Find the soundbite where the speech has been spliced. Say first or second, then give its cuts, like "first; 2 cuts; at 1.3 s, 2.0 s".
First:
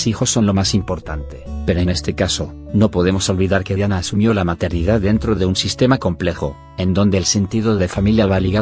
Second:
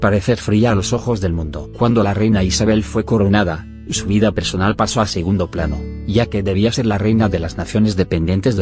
first; 1 cut; at 1.9 s